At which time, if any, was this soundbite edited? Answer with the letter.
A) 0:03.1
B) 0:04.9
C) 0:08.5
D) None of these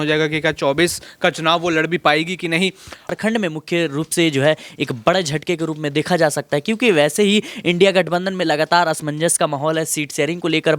A